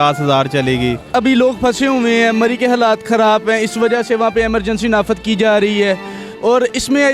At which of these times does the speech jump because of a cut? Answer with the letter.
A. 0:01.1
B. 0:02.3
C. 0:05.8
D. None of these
A